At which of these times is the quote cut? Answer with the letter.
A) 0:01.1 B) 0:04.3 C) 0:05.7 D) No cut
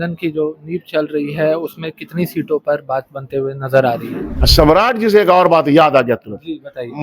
B